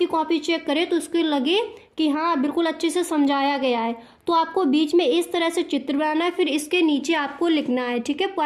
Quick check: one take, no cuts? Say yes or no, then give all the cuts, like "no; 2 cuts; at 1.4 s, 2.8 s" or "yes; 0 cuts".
yes; 0 cuts